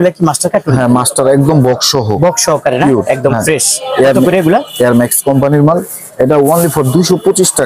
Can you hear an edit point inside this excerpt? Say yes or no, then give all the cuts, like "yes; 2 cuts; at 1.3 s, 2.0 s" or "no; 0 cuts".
no; 0 cuts